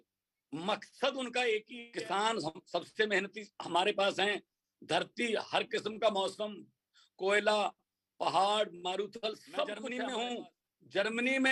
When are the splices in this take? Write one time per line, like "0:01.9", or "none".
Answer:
0:01.8
0:09.9